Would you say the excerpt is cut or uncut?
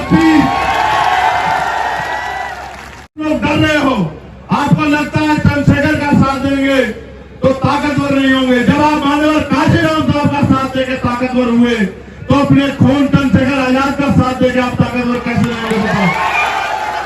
cut